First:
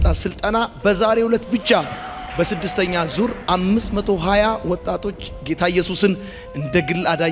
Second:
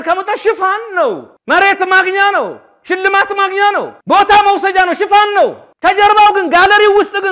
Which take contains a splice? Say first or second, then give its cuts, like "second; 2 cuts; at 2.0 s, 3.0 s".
second; 3 cuts; at 1.3 s, 4.0 s, 5.7 s